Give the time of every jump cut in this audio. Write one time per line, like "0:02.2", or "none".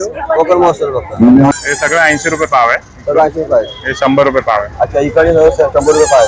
0:01.5